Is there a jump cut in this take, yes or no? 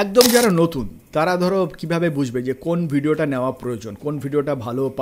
no